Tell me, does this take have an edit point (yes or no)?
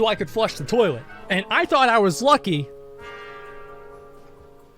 yes